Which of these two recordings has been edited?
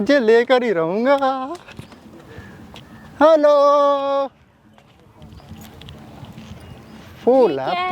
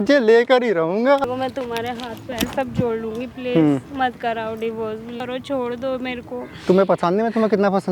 second; 2 cuts; at 1.2 s, 5.1 s

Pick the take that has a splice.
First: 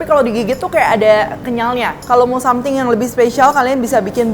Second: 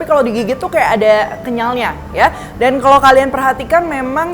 first; 1 cut; at 2.0 s

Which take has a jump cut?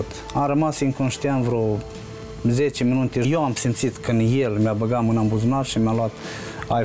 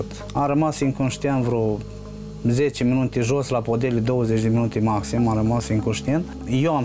first; 1 cut; at 3.3 s

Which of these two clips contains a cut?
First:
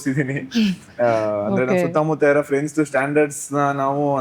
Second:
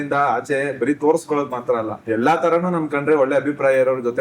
second; 1 cut; at 1.9 s

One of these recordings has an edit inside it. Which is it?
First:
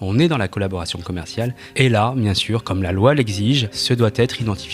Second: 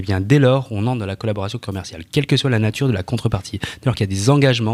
first; 2 cuts; at 1.6 s, 3.7 s

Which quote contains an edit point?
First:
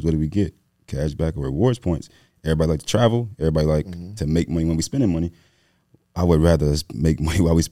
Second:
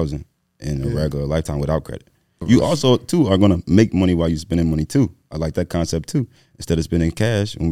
second; 1 cut; at 2.4 s

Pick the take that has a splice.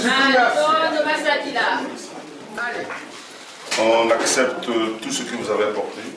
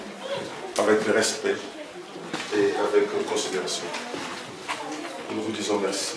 first; 1 cut; at 2.9 s

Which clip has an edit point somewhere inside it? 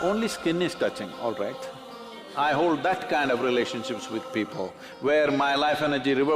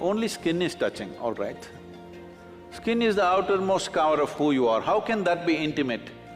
first; 1 cut; at 2.2 s

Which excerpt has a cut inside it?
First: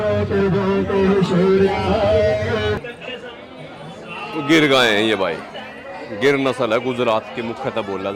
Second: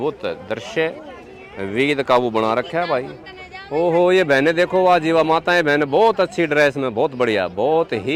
first; 1 cut; at 2.8 s

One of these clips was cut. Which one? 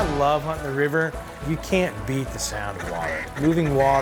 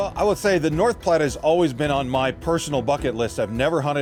first; 1 cut; at 1.3 s

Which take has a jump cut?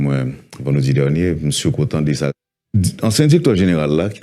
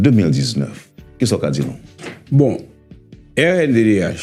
first; 1 cut; at 2.4 s

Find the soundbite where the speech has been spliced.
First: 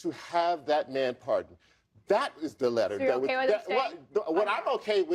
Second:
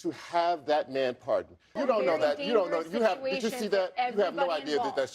second; 1 cut; at 1.8 s

